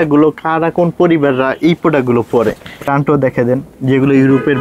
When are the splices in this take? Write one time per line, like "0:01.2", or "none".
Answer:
0:02.9